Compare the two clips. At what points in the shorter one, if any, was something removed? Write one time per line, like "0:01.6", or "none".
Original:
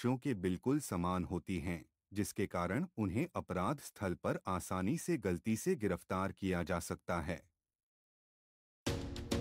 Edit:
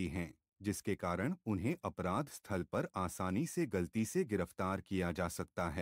none